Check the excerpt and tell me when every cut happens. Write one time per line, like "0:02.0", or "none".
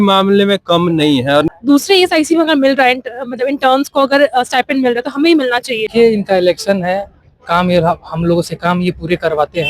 0:01.5
0:05.9